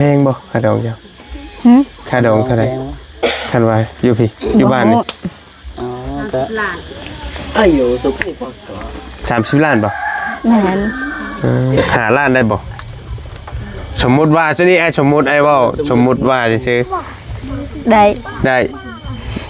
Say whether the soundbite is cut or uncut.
cut